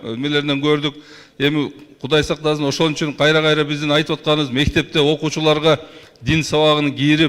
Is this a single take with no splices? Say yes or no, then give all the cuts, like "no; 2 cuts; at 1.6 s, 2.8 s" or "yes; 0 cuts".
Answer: yes; 0 cuts